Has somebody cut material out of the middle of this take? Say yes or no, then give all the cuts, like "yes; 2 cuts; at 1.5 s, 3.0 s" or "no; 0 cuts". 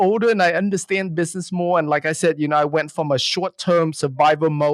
no; 0 cuts